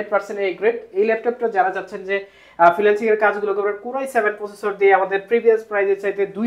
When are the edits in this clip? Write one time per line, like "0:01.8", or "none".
none